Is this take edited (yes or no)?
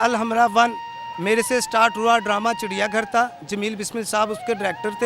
no